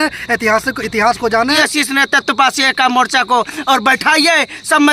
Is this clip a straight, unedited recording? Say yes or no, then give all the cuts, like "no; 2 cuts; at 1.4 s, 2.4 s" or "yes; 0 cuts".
no; 1 cut; at 1.6 s